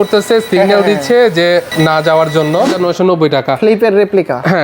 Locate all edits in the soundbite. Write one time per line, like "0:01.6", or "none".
0:01.7
0:02.7